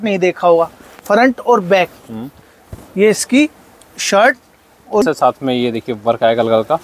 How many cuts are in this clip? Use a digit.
1